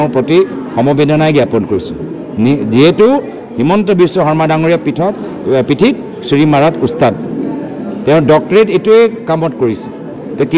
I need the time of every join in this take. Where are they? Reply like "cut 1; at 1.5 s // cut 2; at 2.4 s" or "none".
none